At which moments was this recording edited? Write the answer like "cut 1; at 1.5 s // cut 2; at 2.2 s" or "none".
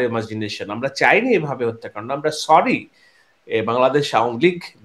none